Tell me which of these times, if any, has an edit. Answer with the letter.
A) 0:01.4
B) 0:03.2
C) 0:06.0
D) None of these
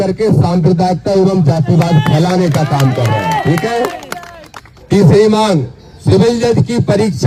D